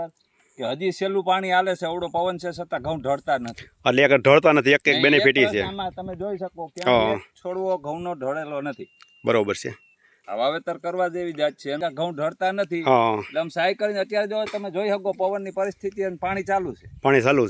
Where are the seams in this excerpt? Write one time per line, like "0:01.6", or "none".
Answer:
0:10.2
0:11.8